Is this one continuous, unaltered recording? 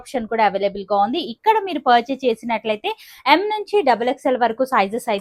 yes; 0 cuts

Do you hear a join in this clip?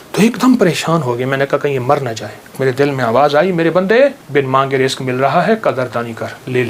yes; 2 cuts; at 2.6 s, 4.2 s

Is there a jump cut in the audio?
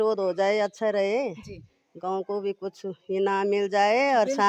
no; 0 cuts

